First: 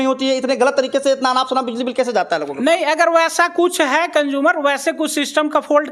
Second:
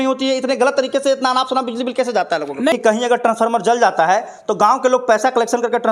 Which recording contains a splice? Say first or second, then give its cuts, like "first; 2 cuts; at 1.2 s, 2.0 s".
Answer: second; 1 cut; at 2.7 s